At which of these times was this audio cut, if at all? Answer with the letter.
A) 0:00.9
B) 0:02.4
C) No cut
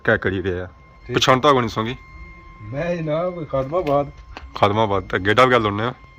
A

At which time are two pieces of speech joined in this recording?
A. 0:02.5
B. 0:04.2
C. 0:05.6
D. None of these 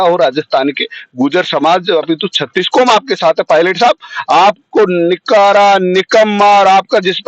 D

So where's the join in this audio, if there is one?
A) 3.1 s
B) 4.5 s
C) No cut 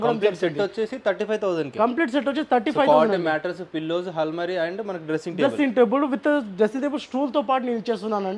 C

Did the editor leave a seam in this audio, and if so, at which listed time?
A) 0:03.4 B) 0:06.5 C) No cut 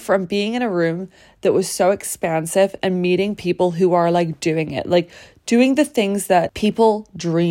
B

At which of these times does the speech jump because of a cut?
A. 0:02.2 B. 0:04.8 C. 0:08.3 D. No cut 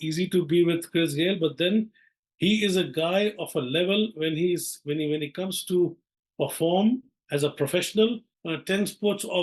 C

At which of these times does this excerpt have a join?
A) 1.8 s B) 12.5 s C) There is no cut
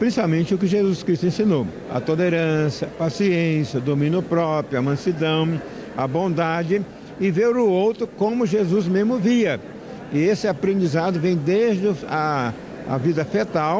A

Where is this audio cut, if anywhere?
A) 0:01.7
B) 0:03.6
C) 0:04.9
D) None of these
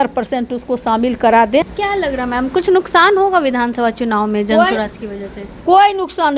A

